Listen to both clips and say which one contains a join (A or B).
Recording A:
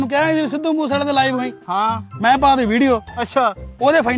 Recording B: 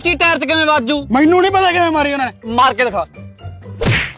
B